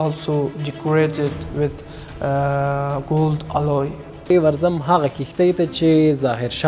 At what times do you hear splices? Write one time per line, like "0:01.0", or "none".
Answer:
0:04.3